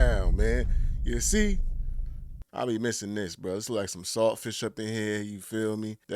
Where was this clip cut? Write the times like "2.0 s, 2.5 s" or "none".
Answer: 2.4 s